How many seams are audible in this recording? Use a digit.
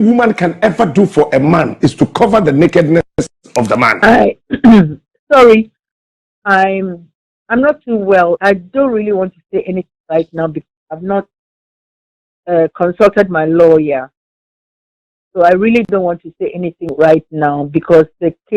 1